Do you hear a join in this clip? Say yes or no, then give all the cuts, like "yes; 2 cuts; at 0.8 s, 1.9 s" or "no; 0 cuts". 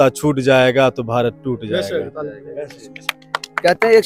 no; 0 cuts